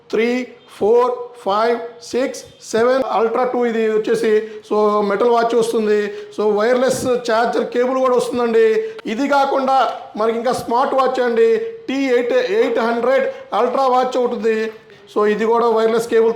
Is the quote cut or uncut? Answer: cut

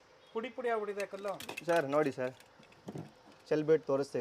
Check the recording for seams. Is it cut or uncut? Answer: uncut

